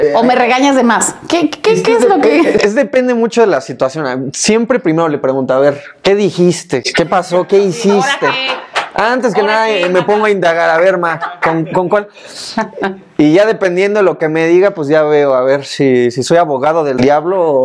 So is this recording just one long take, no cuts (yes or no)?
yes